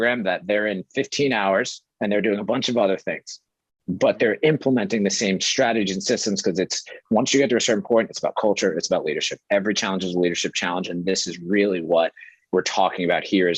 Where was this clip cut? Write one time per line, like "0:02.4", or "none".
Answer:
none